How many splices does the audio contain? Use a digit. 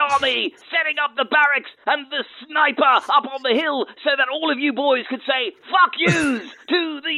0